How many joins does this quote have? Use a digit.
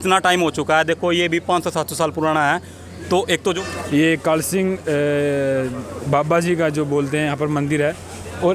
1